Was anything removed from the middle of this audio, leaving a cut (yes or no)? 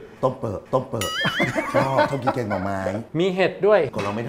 yes